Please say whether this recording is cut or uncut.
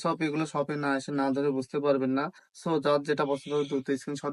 uncut